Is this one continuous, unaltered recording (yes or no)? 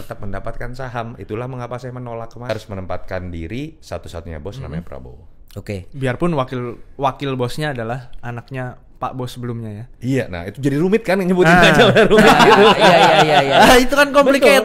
no